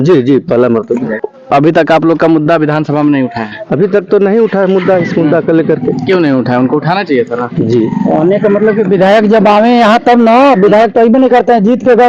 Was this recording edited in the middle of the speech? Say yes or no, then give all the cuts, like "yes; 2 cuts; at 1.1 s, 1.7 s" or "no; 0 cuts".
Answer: yes; 1 cut; at 1.2 s